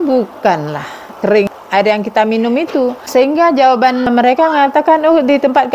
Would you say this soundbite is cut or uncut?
cut